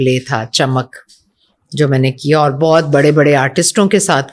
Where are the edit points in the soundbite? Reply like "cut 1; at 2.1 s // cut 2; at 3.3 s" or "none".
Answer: none